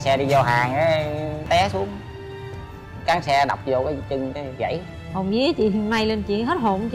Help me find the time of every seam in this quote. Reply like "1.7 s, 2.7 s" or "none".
1.4 s, 5.0 s